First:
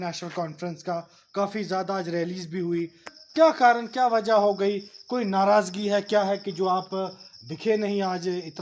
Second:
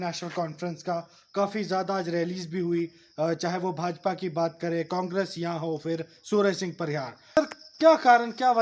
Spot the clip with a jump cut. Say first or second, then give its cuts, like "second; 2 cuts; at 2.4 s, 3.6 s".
first; 1 cut; at 3.1 s